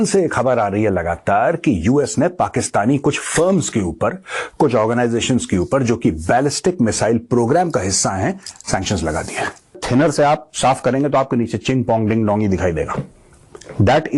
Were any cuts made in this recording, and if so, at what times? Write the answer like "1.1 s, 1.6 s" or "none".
9.8 s